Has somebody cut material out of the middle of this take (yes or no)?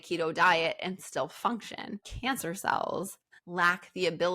yes